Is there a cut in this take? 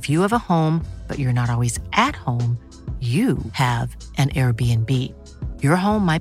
no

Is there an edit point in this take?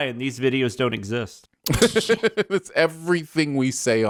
no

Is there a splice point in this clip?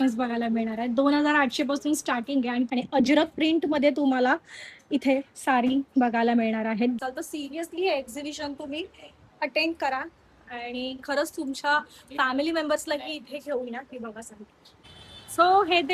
yes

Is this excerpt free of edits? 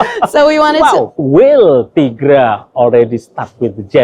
no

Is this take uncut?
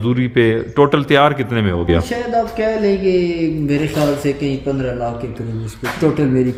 yes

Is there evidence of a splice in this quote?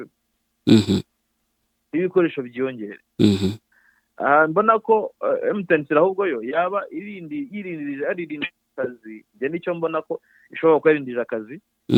no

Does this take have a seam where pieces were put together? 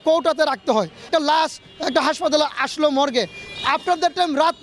yes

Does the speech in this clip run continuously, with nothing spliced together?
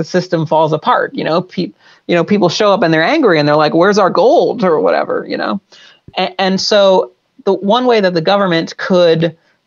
yes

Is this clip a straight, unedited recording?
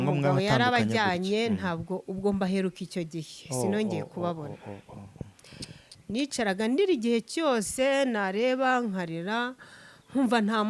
yes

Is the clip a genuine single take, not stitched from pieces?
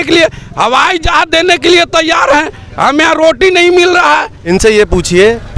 no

